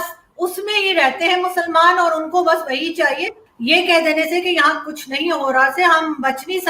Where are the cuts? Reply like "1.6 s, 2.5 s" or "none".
3.4 s